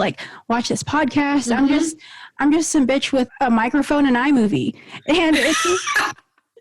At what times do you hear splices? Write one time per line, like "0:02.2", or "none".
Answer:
0:03.3